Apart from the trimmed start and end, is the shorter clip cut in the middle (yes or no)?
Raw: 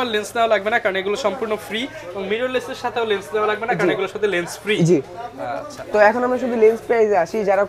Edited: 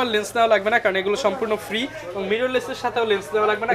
no